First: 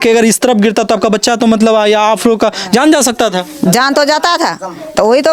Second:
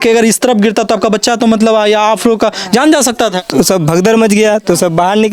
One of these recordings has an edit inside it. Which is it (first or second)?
second